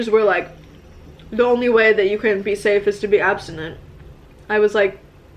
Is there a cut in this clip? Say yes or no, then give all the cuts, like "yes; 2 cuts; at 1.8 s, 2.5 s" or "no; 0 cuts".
no; 0 cuts